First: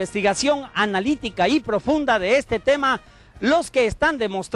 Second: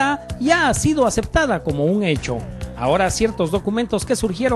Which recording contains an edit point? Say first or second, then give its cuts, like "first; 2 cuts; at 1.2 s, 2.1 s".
first; 1 cut; at 2.7 s